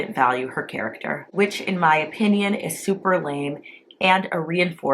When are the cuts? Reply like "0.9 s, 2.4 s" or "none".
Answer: 1.2 s

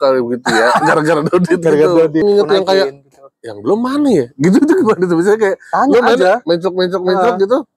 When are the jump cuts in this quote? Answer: 2.2 s

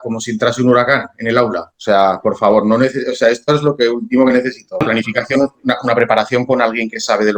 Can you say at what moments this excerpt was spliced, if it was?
1.7 s, 4.8 s

